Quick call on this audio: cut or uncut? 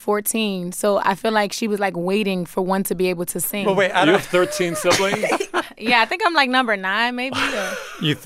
uncut